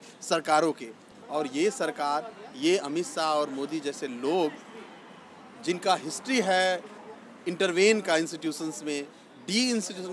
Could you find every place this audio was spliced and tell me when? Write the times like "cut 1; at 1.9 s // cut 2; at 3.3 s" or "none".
none